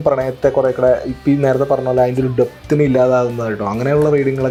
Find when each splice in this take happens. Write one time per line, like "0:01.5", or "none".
none